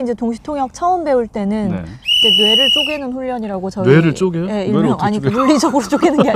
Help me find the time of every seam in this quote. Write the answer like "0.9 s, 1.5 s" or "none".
none